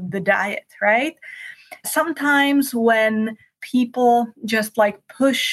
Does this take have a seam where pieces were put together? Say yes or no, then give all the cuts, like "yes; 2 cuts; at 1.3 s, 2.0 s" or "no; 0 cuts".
yes; 2 cuts; at 1.9 s, 3.6 s